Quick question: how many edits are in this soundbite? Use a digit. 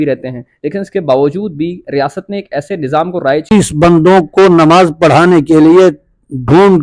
1